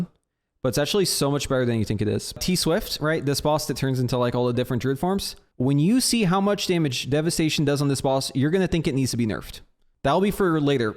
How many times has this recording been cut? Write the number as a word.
three